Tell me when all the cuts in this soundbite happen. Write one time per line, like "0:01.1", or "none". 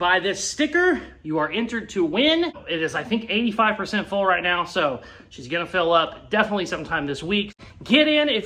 0:07.5